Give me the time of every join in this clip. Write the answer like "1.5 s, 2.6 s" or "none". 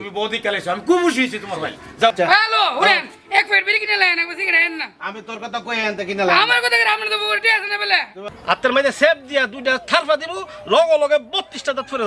2.1 s, 8.2 s